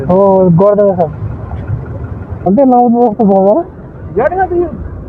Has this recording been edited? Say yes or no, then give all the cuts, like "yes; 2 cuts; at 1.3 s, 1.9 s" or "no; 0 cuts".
yes; 1 cut; at 2.5 s